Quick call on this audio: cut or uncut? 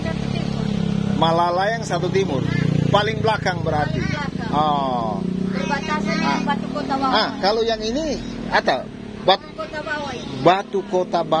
uncut